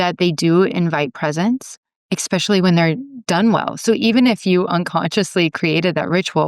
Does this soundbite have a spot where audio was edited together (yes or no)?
yes